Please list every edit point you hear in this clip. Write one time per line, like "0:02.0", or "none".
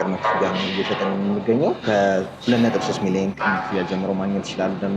0:01.8
0:03.4